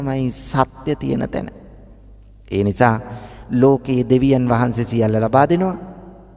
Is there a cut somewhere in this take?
no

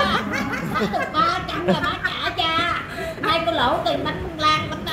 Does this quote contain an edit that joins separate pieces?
no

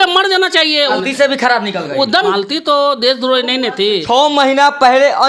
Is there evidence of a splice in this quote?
yes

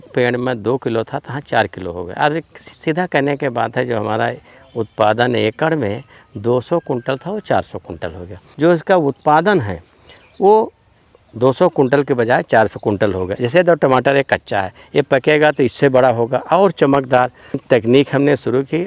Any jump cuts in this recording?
yes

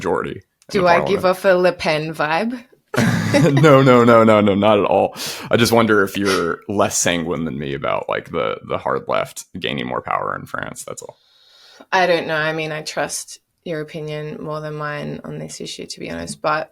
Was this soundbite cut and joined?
no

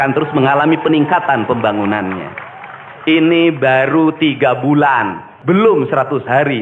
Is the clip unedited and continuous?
no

